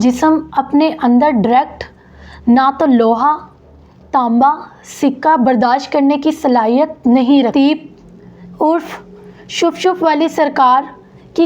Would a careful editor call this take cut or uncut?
cut